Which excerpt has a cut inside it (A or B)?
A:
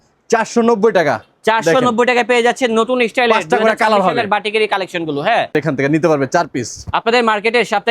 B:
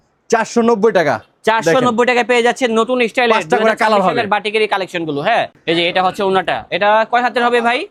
A